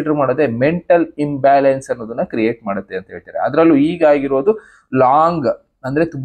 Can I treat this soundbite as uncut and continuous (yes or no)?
yes